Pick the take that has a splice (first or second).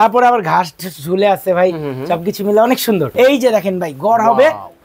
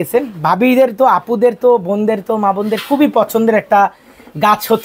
first